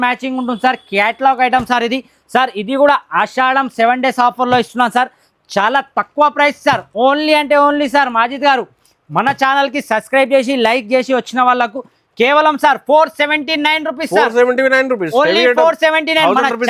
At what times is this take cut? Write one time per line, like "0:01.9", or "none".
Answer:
none